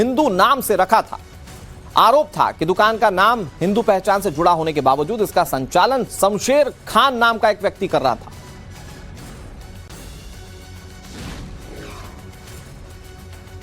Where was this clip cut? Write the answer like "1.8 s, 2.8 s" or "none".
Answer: 11.2 s